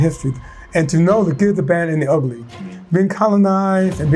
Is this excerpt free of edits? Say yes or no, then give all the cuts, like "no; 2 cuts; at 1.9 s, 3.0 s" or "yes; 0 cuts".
yes; 0 cuts